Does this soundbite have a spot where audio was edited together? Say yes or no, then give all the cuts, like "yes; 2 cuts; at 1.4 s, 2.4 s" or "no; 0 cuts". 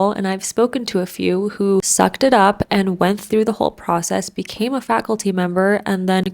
yes; 1 cut; at 1.9 s